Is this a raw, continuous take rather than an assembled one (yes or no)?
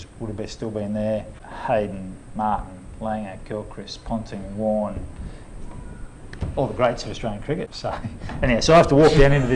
no